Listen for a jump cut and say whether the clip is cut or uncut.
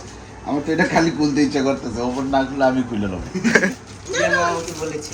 cut